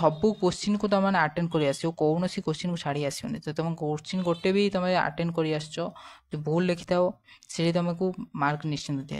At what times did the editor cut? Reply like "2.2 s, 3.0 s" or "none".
none